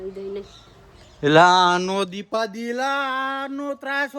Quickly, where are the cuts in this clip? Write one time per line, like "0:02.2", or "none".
none

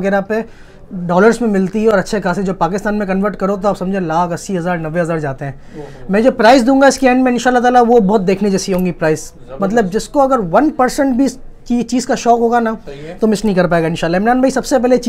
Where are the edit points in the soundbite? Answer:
none

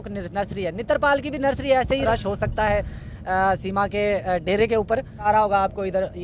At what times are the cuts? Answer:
0:02.0
0:05.3

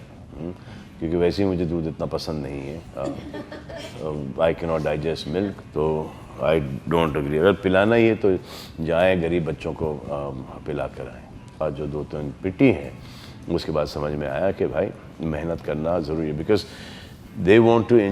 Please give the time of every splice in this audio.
0:11.6

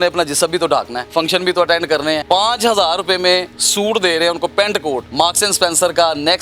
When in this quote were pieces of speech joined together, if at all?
0:01.0
0:02.2
0:03.6
0:05.1

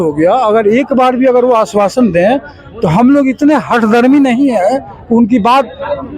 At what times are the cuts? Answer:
none

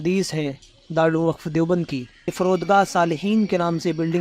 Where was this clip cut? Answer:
0:02.2

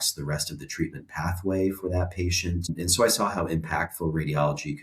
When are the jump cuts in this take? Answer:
0:02.7

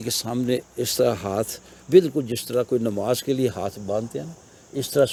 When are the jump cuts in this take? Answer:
none

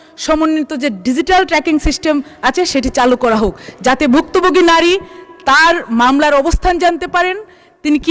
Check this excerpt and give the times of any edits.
none

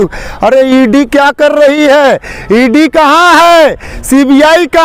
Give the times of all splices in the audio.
none

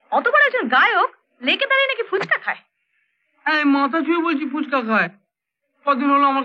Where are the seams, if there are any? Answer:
none

